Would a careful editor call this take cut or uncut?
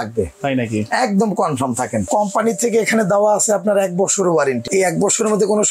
cut